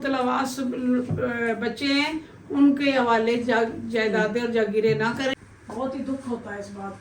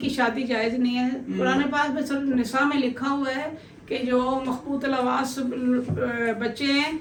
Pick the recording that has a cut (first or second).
first